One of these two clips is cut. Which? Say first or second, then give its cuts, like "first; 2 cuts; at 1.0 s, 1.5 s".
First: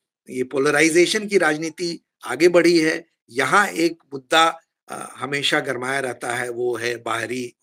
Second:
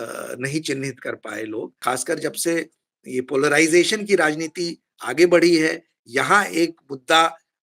second; 1 cut; at 1.7 s